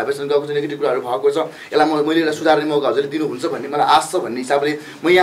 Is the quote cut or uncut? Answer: uncut